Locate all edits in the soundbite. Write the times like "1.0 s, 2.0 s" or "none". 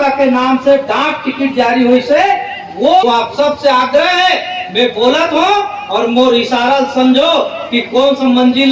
3.0 s